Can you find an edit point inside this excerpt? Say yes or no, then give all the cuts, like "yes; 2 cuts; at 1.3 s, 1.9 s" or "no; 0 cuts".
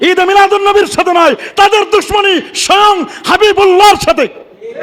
no; 0 cuts